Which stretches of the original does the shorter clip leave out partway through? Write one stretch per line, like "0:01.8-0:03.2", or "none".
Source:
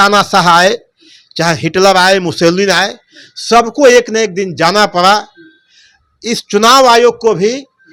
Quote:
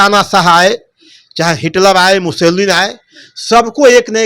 none